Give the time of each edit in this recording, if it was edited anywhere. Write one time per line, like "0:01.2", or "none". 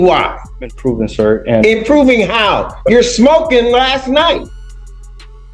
none